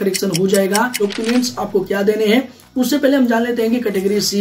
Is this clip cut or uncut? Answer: cut